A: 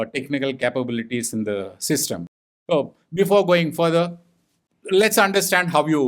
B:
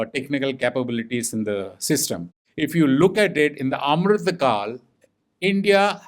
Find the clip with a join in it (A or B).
B